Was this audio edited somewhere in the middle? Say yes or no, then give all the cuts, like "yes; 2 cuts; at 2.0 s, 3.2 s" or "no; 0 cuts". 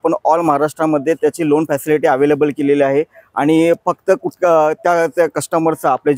no; 0 cuts